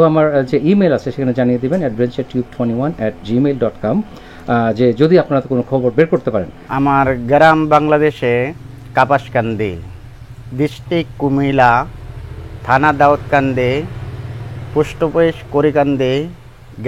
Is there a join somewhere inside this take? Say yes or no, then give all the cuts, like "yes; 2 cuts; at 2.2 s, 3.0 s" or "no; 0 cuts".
yes; 1 cut; at 6.6 s